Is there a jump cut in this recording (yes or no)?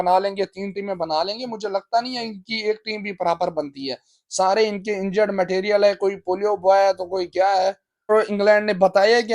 yes